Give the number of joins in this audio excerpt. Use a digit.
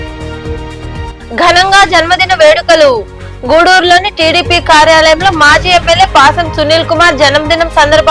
1